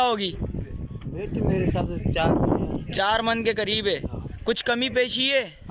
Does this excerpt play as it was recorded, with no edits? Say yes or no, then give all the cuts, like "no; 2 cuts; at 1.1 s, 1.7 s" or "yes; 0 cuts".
yes; 0 cuts